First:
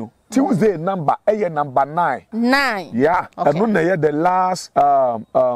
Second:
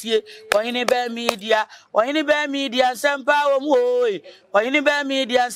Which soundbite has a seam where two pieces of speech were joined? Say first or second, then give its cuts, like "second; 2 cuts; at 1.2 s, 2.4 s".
first; 3 cuts; at 2.2 s, 3.3 s, 4.6 s